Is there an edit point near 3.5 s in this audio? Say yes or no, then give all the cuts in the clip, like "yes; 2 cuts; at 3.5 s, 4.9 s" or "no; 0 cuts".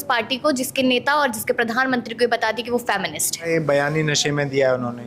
yes; 1 cut; at 3.5 s